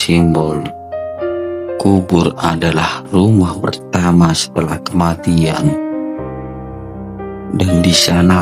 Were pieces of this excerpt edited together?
yes; 2 cuts; at 5.7 s, 7.5 s

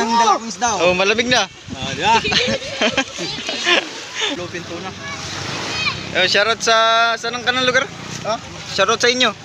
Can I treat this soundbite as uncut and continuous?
no; 1 cut; at 4.4 s

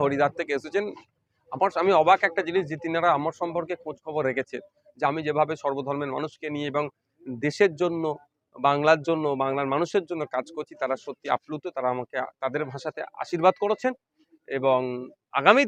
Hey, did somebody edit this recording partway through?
no; 0 cuts

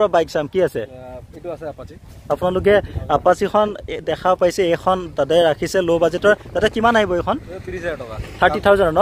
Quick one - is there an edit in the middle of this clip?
no; 0 cuts

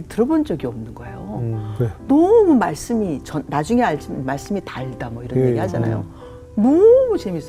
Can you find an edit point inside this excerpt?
no; 0 cuts

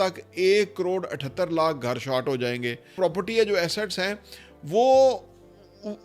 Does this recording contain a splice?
yes; 1 cut; at 2.8 s

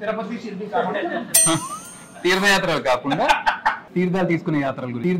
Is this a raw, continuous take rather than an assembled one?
no; 1 cut; at 3.8 s

